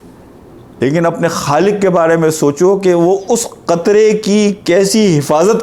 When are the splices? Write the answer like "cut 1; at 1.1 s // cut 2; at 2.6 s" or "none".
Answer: none